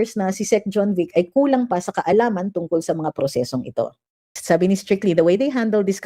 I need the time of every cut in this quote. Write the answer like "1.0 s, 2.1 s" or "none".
4.4 s